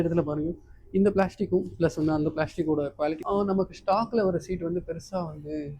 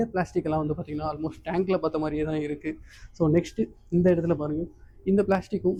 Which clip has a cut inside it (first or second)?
first